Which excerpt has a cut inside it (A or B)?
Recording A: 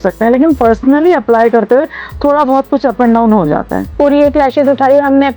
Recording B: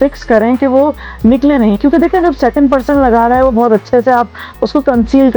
A